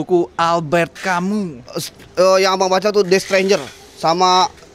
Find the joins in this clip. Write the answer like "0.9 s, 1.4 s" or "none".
none